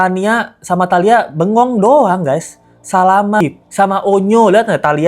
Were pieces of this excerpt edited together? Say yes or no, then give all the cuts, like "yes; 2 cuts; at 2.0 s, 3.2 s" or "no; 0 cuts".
yes; 1 cut; at 3.4 s